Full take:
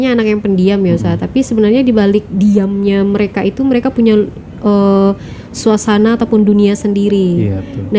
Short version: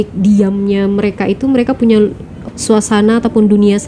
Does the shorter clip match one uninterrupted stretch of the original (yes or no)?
no